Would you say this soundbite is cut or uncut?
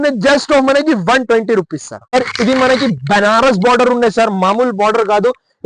cut